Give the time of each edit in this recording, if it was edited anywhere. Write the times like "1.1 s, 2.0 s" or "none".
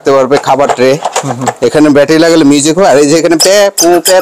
none